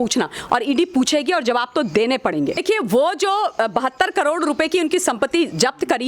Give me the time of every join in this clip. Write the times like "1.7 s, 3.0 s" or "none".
2.6 s